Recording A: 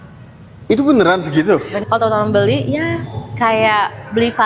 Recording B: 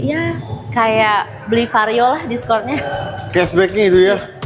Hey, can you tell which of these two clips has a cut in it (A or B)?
A